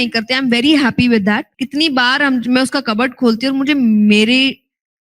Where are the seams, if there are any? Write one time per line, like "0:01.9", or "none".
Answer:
0:01.6